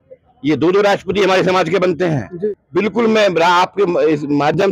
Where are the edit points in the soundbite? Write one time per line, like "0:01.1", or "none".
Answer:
0:02.6